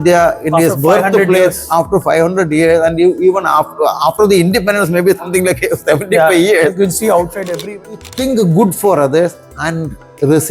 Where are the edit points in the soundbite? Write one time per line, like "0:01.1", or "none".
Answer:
0:07.6